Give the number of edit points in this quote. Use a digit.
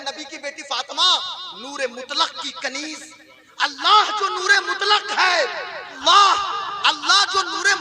1